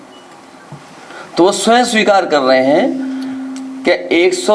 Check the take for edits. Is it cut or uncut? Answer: uncut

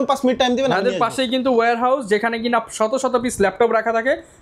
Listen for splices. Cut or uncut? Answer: uncut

